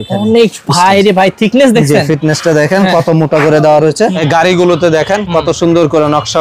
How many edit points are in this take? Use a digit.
1